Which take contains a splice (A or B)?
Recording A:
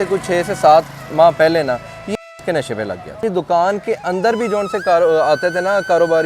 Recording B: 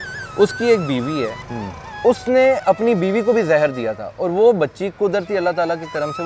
A